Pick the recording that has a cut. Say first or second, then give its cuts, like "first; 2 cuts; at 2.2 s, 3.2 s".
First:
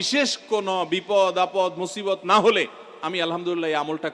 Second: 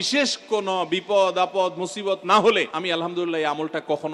second; 1 cut; at 2.7 s